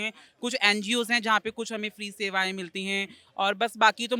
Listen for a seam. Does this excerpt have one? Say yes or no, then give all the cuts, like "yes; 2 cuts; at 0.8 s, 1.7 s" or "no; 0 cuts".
no; 0 cuts